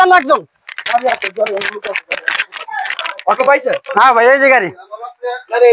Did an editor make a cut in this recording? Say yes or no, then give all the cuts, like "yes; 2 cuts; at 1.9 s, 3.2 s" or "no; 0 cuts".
yes; 1 cut; at 2.6 s